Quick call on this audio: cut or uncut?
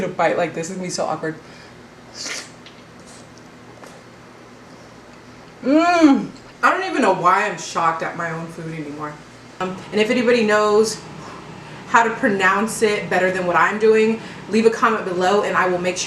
cut